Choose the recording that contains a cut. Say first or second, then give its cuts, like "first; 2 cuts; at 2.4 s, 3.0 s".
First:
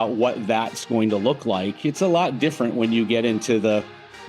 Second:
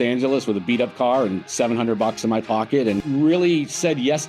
second; 1 cut; at 3.0 s